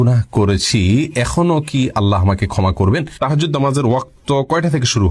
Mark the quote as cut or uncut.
cut